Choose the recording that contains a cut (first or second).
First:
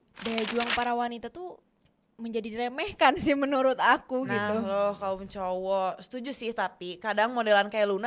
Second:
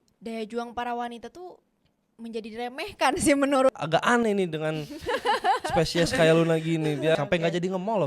second